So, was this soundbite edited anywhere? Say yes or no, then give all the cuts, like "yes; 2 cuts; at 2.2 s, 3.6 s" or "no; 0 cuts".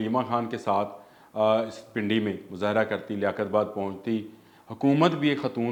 no; 0 cuts